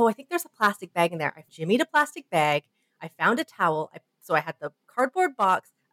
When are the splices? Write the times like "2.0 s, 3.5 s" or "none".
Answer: 1.4 s